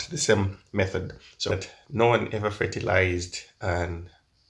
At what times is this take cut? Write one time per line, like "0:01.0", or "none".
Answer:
0:01.5